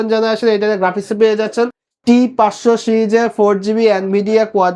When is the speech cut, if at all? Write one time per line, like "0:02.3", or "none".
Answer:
0:01.9